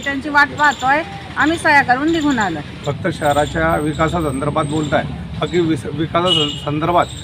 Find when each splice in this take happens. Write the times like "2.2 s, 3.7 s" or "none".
2.7 s